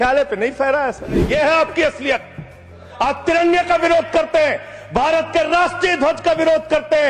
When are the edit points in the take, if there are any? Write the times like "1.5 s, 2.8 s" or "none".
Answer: 1.2 s